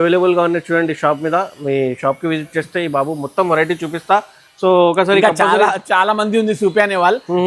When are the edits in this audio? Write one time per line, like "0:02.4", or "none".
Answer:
none

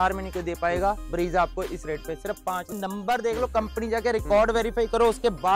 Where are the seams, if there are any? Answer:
0:02.7

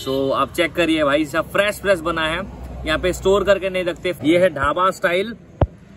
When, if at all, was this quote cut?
0:04.2

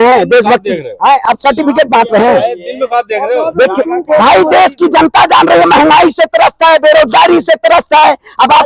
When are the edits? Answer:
none

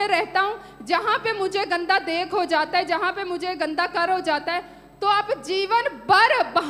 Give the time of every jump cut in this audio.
none

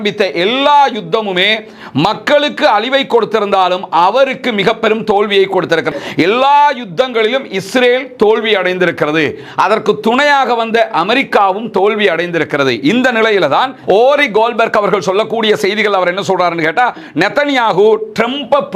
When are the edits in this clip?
0:05.9
0:13.8

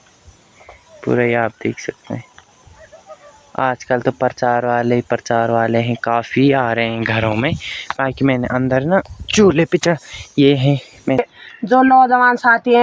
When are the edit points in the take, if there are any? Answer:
0:11.2

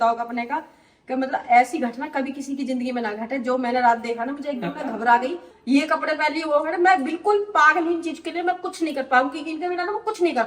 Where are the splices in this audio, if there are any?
0:05.5

